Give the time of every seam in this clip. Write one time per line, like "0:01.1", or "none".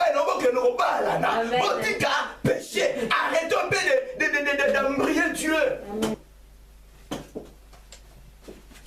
0:06.2